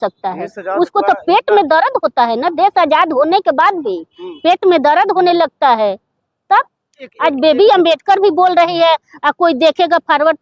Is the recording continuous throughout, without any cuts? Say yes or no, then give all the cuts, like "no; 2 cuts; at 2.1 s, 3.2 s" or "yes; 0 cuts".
yes; 0 cuts